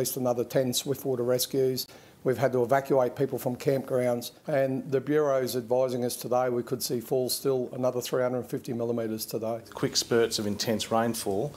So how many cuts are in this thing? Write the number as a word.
two